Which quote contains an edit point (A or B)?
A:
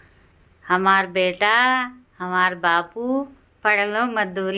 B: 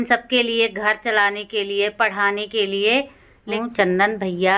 B